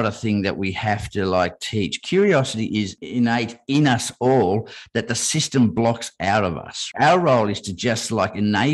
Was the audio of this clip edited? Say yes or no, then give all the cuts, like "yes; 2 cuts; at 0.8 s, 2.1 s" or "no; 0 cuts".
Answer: yes; 2 cuts; at 3.0 s, 6.8 s